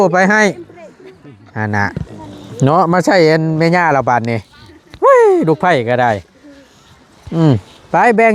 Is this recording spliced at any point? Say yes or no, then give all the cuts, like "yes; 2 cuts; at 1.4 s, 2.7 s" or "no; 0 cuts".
no; 0 cuts